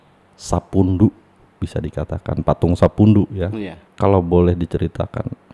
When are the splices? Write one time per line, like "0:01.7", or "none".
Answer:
0:03.8